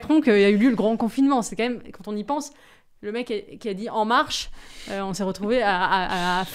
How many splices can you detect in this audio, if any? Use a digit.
0